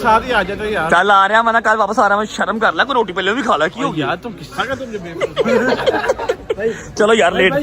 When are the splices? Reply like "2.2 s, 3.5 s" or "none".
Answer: none